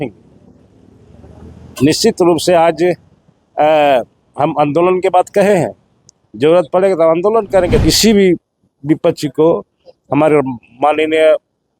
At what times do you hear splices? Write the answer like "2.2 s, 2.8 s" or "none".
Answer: 7.8 s